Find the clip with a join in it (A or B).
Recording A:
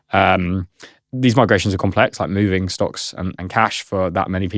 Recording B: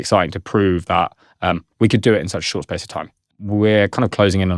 B